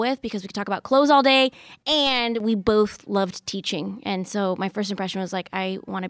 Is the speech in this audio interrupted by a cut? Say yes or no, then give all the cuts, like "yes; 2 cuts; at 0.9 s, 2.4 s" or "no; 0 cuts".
no; 0 cuts